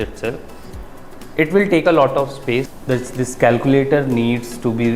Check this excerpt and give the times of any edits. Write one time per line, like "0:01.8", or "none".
0:02.7